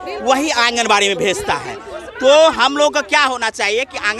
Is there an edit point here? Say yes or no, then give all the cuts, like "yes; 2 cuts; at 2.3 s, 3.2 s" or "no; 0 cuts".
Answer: no; 0 cuts